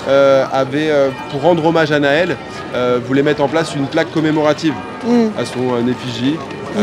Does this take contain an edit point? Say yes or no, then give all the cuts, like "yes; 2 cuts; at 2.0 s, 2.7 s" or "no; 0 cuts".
no; 0 cuts